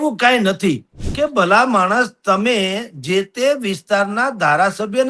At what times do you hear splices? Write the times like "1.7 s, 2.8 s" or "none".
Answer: 1.0 s